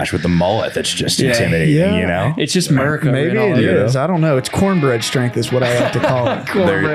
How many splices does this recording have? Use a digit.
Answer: 0